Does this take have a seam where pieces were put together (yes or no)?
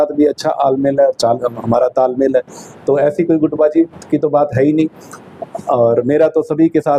no